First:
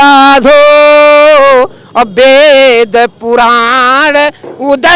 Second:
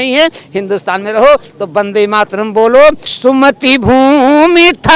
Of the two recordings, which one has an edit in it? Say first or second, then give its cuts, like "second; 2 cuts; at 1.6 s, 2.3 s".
second; 1 cut; at 3.1 s